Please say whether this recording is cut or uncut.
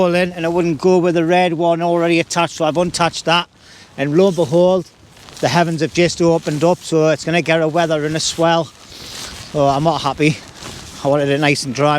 uncut